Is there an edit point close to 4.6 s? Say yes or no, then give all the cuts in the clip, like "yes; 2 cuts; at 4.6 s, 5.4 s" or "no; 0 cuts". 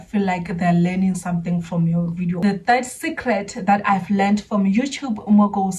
no; 1 cut; at 2.4 s